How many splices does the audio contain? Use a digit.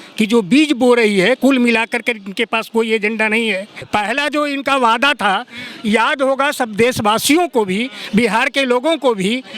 1